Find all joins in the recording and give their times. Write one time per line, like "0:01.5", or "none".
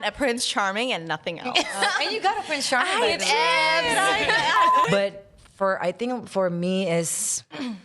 0:04.8